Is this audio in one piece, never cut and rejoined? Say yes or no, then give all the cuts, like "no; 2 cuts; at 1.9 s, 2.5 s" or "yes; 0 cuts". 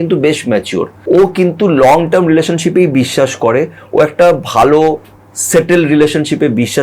no; 1 cut; at 0.9 s